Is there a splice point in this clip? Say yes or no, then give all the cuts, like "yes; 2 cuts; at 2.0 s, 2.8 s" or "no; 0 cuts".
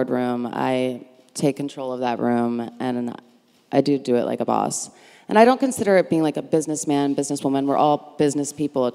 no; 0 cuts